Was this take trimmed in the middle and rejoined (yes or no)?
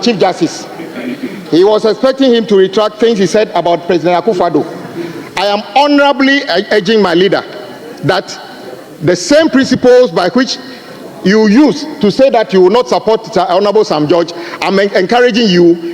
no